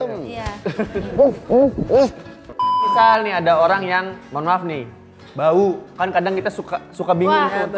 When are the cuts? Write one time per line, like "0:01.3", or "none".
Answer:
0:02.9